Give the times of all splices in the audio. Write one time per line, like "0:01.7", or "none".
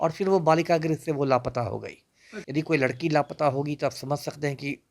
0:02.4

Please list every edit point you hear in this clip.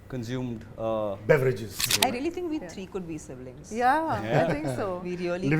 0:01.9

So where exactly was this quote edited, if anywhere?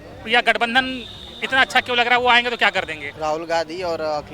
0:03.0

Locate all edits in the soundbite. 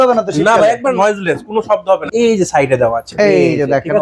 0:00.9
0:02.1

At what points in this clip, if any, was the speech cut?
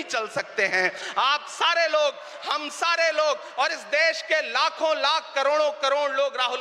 none

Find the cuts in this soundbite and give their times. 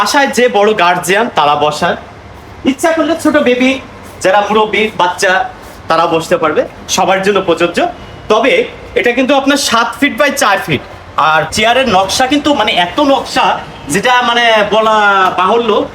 0:11.5

